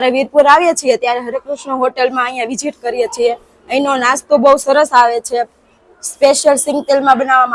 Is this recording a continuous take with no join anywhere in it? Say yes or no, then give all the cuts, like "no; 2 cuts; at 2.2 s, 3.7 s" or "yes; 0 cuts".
yes; 0 cuts